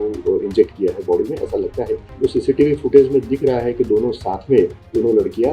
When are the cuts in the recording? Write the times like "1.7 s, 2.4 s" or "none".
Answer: 2.0 s